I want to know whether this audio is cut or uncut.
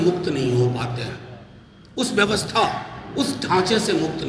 uncut